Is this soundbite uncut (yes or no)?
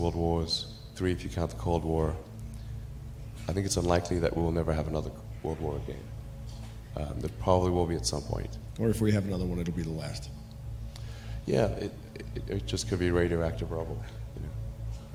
yes